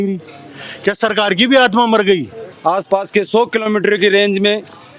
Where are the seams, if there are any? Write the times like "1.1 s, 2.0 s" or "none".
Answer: 2.4 s